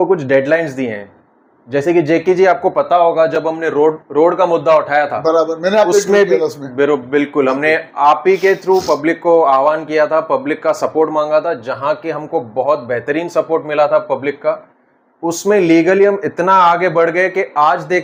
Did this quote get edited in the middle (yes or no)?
no